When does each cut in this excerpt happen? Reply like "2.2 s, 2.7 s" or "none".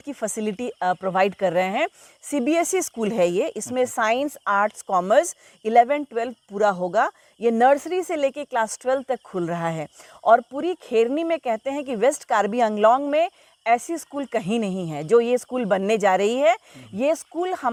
none